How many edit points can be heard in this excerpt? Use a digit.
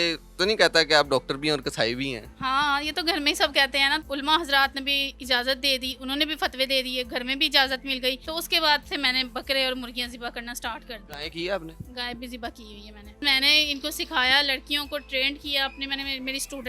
5